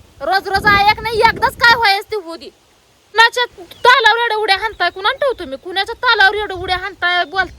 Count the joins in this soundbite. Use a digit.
1